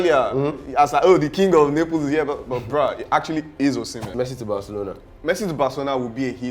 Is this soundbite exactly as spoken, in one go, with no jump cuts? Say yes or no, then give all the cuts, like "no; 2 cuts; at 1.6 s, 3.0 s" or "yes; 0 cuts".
no; 1 cut; at 4.0 s